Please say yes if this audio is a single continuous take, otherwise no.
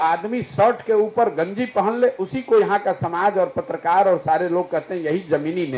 yes